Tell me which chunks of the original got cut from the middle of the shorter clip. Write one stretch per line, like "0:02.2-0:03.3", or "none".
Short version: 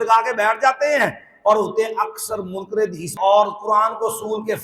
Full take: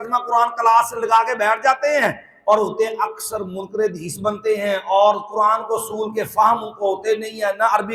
0:04.2-0:04.8